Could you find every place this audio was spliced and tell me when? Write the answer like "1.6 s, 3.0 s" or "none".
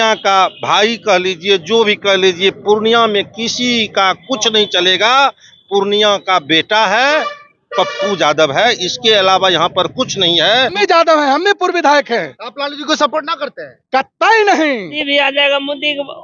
10.8 s, 15.0 s